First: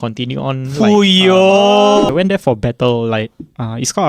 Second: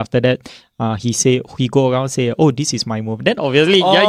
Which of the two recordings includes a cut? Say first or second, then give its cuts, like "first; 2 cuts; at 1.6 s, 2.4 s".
first; 1 cut; at 2.1 s